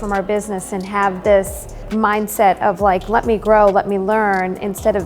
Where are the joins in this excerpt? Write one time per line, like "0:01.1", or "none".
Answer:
0:01.9